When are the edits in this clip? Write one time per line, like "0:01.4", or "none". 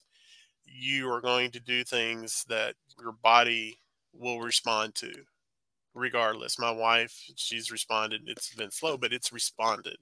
0:02.9